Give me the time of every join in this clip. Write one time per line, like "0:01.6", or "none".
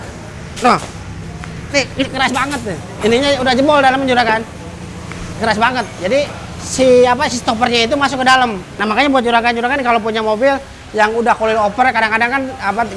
0:02.9
0:08.8